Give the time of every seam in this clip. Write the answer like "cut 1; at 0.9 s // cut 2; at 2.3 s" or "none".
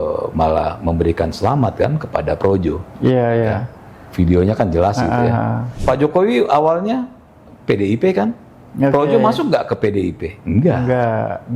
cut 1; at 5.6 s